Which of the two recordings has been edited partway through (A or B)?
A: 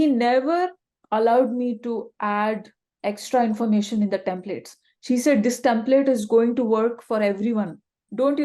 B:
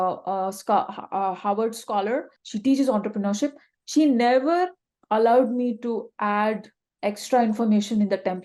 B